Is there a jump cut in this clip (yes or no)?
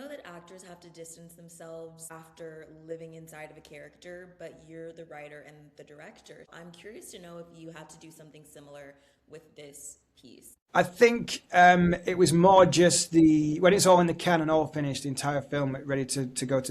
yes